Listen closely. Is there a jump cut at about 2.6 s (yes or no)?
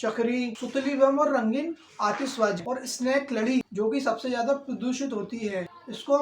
yes